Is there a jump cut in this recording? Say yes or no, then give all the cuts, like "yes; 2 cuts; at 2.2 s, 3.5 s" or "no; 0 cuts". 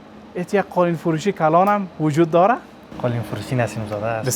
yes; 1 cut; at 2.9 s